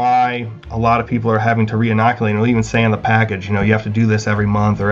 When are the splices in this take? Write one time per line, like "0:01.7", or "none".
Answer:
none